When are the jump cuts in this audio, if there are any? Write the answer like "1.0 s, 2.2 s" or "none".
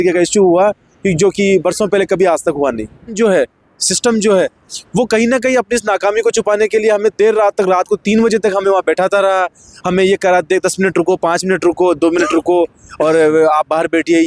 3.1 s

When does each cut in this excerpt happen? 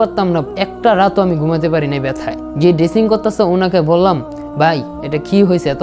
2.4 s

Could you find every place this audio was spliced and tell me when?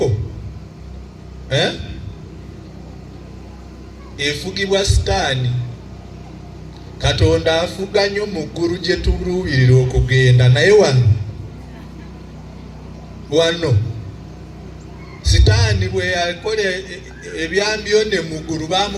none

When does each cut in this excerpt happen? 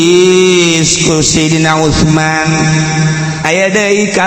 3.3 s

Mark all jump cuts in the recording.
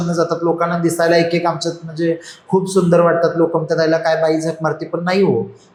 none

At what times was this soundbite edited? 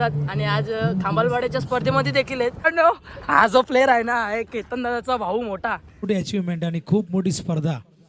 2.6 s, 6.3 s

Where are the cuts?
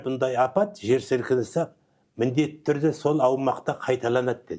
none

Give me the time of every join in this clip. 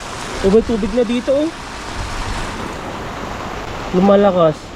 3.7 s

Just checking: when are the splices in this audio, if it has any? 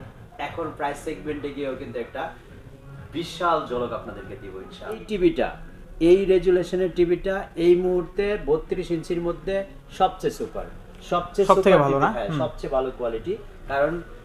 5.1 s

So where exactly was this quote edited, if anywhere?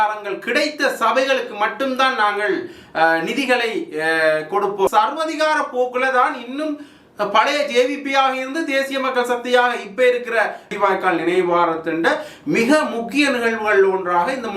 4.9 s, 10.7 s

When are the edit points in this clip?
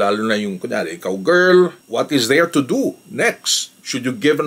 1.8 s

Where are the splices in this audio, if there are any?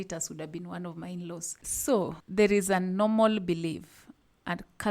1.6 s

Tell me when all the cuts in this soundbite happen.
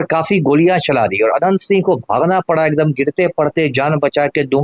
none

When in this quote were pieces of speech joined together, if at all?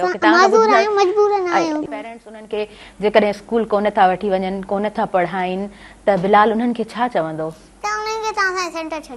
1.8 s

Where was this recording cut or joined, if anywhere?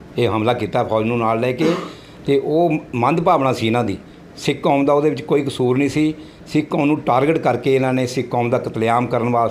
none

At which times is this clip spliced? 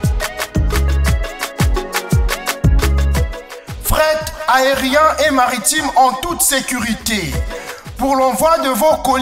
none

